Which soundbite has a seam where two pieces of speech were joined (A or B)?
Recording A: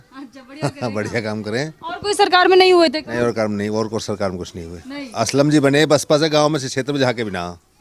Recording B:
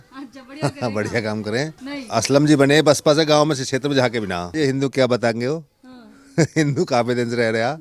B